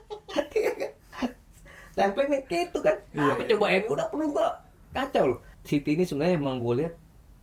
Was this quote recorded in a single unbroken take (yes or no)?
no